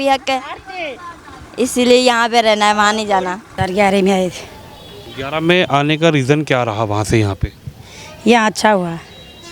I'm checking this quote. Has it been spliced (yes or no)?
yes